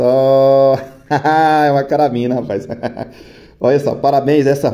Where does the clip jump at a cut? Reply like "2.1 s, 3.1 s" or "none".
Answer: none